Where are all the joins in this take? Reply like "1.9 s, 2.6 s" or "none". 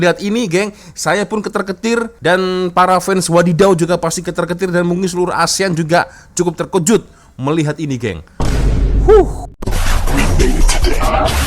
9.4 s